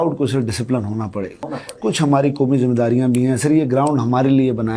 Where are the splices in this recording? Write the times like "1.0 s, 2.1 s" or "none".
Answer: 1.4 s